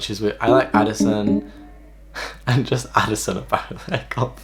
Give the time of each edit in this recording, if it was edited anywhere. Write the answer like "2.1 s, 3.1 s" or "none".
none

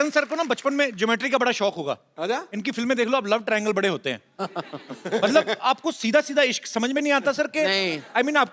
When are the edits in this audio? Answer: none

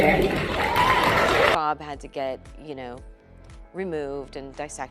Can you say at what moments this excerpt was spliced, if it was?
1.6 s

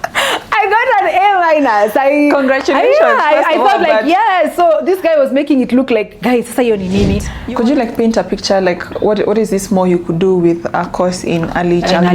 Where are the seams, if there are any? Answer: 7.3 s

